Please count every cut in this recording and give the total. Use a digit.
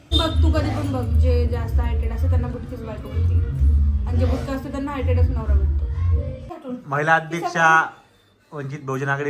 1